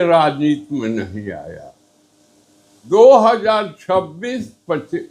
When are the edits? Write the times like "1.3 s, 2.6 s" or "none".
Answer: 2.7 s